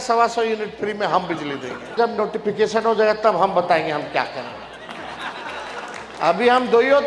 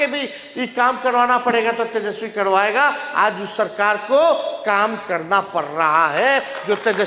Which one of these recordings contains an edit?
first; 1 cut; at 2.0 s

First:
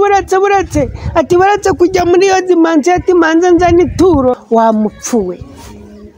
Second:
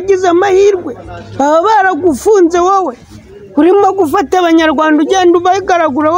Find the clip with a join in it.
first; 1 cut; at 4.4 s

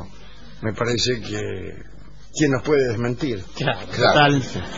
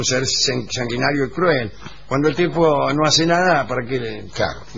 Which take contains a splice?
first; 1 cut; at 3.6 s

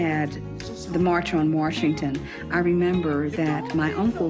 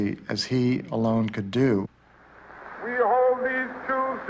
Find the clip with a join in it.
second; 1 cut; at 3.2 s

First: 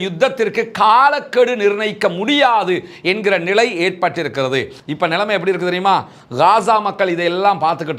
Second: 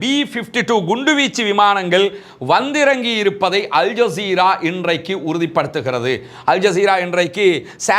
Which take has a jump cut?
first; 1 cut; at 4.8 s

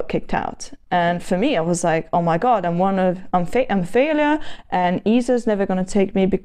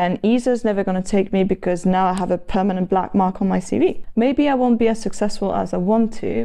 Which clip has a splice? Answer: second; 1 cut; at 4.0 s

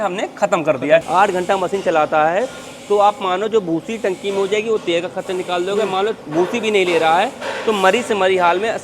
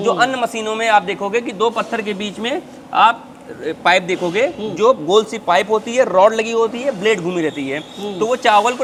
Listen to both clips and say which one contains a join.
first; 1 cut; at 1.1 s

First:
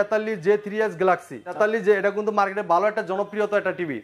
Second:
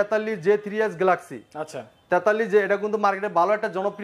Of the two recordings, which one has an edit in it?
first; 1 cut; at 1.6 s

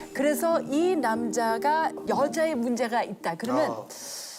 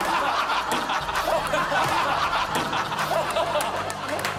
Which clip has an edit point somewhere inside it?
first; 1 cut; at 2.0 s

